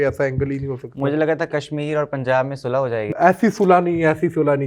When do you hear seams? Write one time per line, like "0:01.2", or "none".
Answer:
0:03.1